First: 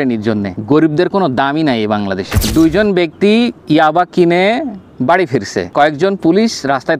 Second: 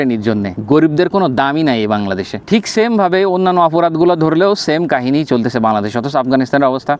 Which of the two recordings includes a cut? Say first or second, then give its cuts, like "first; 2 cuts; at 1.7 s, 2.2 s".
first; 1 cut; at 2.4 s